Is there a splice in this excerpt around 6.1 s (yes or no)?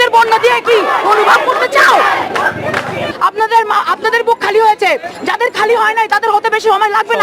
no